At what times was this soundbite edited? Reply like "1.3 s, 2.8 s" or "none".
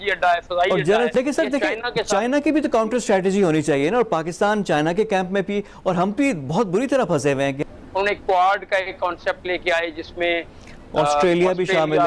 1.1 s, 7.7 s